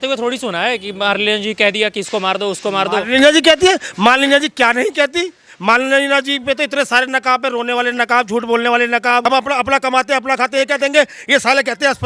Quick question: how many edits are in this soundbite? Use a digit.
1